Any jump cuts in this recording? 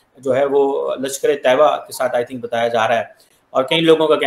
no; 0 cuts

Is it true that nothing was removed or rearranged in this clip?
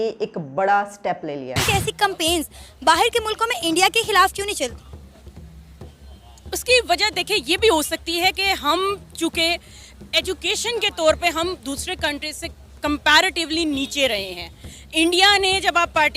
no; 1 cut; at 1.5 s

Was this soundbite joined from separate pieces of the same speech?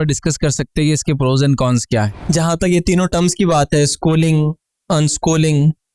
yes; 1 cut; at 2.1 s

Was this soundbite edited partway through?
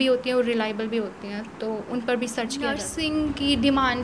yes; 1 cut; at 2.9 s

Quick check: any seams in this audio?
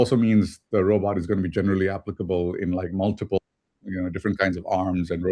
no; 0 cuts

